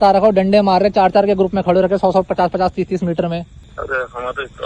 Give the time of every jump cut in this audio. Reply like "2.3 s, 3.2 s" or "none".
3.6 s